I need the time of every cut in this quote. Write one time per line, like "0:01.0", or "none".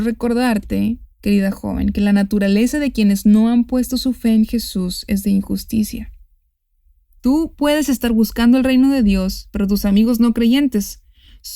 0:01.1